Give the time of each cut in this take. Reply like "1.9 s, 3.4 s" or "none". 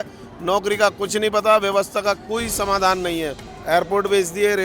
3.5 s